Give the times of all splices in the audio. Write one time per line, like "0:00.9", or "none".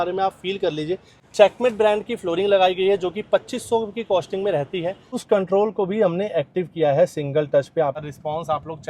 0:01.1
0:05.2
0:08.1